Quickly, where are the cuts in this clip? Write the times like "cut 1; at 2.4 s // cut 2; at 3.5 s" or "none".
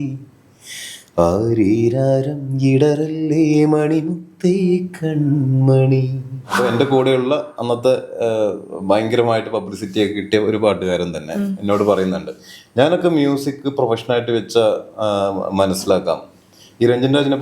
cut 1; at 6.5 s